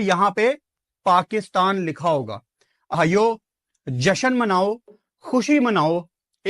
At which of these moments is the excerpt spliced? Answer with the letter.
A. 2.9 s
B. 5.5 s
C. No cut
A